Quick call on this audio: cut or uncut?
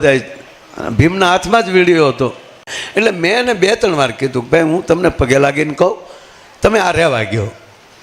cut